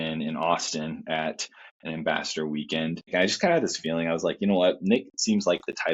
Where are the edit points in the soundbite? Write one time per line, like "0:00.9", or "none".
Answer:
0:03.0